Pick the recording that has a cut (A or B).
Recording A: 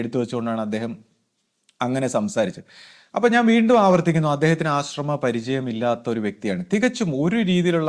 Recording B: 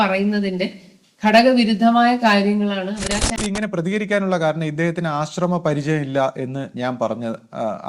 B